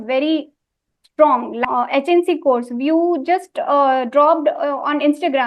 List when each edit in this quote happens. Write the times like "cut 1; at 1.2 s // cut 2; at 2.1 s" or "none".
cut 1; at 1.6 s